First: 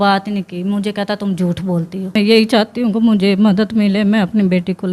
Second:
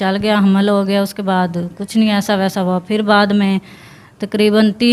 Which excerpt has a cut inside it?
first; 1 cut; at 2.2 s

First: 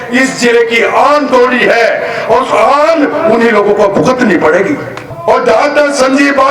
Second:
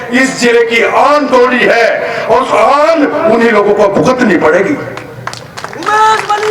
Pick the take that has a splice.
first; 1 cut; at 5.1 s

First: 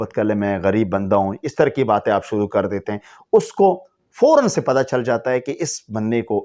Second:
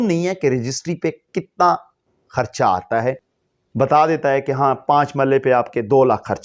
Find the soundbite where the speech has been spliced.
second; 1 cut; at 3.3 s

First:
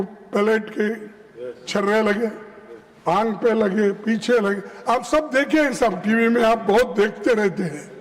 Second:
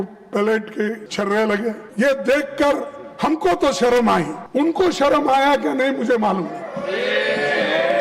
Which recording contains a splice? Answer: second; 3 cuts; at 1.0 s, 1.8 s, 4.4 s

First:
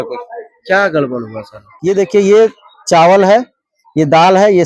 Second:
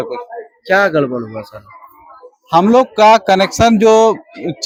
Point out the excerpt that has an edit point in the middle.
first; 1 cut; at 1.7 s

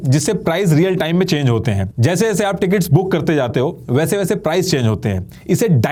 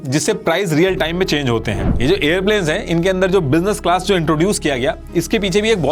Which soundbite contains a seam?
second; 1 cut; at 1.9 s

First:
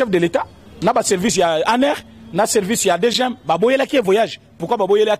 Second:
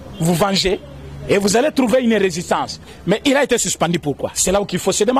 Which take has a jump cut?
second; 1 cut; at 2.8 s

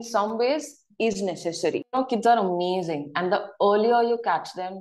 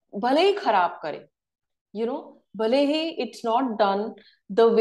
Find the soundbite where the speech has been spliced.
first; 1 cut; at 1.9 s

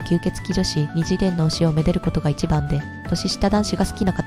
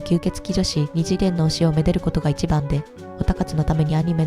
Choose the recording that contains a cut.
first; 1 cut; at 2.9 s

